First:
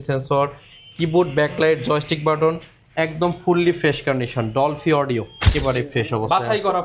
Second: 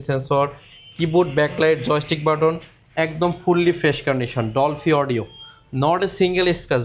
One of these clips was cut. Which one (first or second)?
first